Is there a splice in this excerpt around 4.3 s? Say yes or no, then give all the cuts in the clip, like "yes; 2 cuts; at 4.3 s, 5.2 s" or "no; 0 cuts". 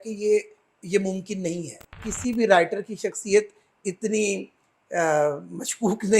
no; 1 cut; at 2.1 s